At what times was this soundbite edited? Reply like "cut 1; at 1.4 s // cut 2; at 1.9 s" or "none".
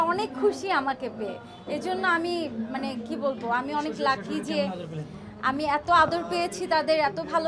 none